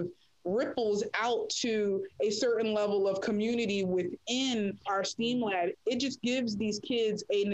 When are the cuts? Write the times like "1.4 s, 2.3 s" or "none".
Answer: 4.9 s